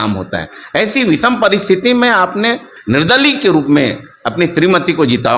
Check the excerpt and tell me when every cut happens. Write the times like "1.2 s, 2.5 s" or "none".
2.7 s